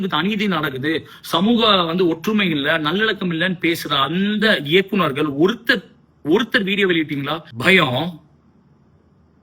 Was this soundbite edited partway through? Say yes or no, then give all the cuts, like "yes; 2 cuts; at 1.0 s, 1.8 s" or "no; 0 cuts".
yes; 1 cut; at 7.4 s